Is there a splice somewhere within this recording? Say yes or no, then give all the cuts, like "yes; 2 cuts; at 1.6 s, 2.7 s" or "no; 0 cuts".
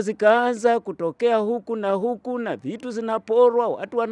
no; 0 cuts